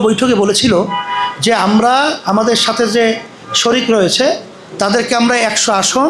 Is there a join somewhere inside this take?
no; 0 cuts

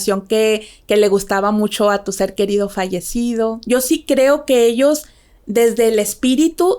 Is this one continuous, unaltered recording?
no; 1 cut; at 3.6 s

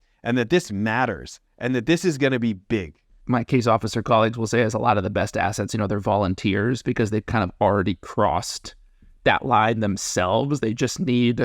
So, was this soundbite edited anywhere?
yes; 1 cut; at 3.1 s

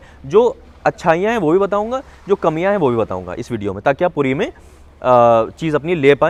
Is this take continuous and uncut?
yes; 0 cuts

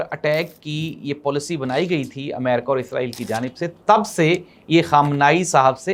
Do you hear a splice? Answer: no; 0 cuts

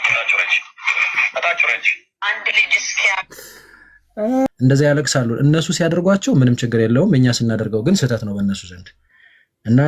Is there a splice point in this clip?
yes; 1 cut; at 4.5 s

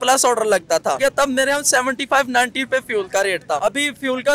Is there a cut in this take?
yes; 2 cuts; at 1.0 s, 3.6 s

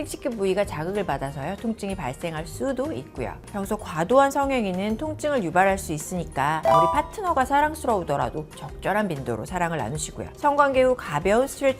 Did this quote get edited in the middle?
yes; 1 cut; at 3.4 s

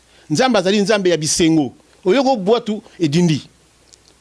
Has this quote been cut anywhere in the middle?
yes; 1 cut; at 1.8 s

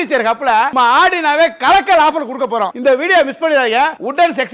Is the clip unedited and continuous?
yes; 0 cuts

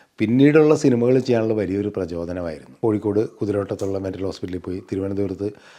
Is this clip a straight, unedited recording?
no; 1 cut; at 2.6 s

